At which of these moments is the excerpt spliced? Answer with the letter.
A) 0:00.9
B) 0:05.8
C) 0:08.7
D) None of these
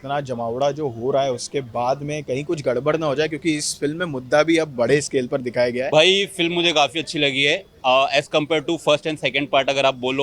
B